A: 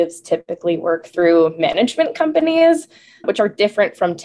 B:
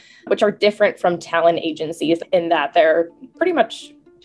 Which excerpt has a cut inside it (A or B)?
B